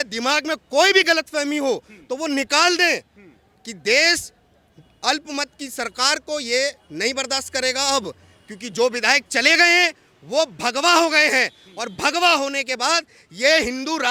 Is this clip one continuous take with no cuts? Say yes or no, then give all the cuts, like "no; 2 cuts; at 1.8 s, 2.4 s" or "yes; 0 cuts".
yes; 0 cuts